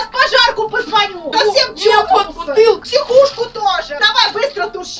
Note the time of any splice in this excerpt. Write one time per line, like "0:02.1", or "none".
0:01.2
0:02.8
0:04.0